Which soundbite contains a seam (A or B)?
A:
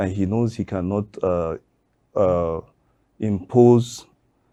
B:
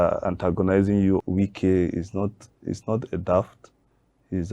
B